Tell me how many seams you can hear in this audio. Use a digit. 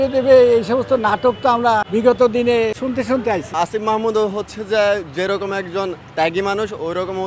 2